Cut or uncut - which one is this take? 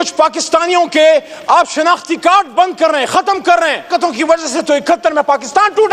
cut